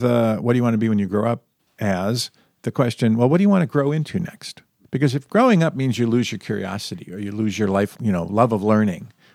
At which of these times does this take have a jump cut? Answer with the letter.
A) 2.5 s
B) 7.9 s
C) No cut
B